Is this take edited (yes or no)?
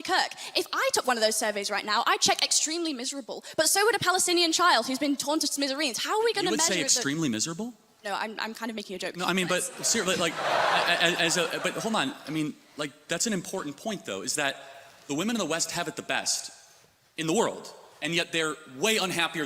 no